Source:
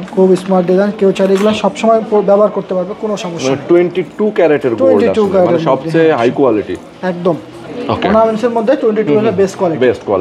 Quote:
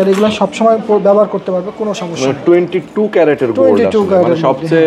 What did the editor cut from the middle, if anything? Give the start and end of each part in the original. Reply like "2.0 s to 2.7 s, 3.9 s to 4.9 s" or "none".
none